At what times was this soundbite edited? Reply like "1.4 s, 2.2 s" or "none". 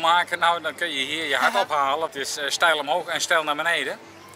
2.1 s